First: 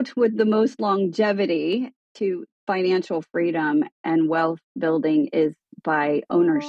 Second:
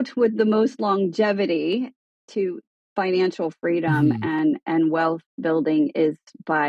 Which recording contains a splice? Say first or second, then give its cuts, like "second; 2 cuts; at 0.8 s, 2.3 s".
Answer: first; 2 cuts; at 2.3 s, 4.0 s